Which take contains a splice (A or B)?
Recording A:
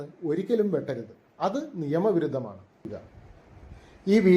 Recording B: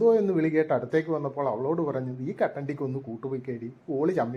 A